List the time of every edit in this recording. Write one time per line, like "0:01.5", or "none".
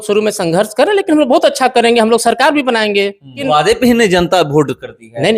0:03.4